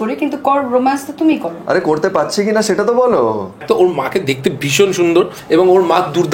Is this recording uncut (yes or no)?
no